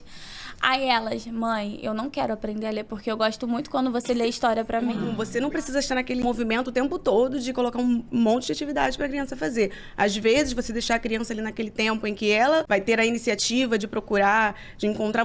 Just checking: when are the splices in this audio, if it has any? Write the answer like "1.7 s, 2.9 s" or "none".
5.2 s, 6.2 s, 12.7 s